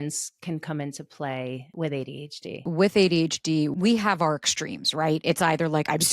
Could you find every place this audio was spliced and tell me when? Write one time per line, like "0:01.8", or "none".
0:01.7
0:02.6
0:03.7

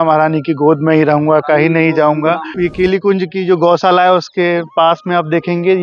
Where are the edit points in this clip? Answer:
0:02.5

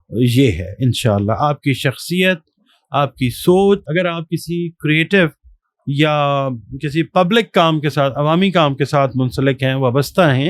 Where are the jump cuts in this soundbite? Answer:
0:03.8

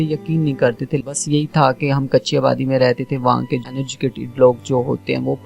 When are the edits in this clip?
0:01.0
0:03.7

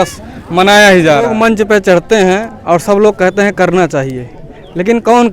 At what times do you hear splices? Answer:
0:01.3

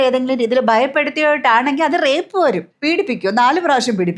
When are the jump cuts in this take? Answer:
0:02.7

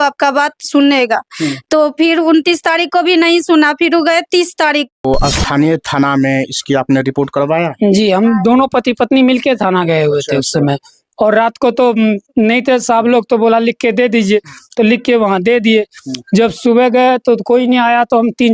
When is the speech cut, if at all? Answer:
0:04.9

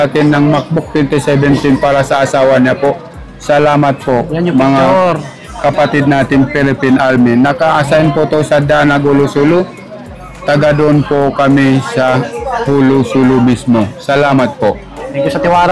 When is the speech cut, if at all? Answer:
none

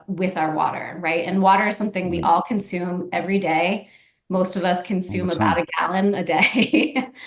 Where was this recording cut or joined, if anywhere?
none

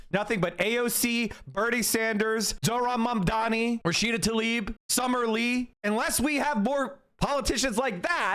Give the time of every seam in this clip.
0:03.8

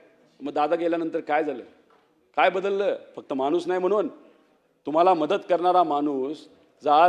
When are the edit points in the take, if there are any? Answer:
none

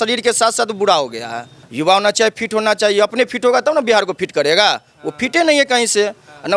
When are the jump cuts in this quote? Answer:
none

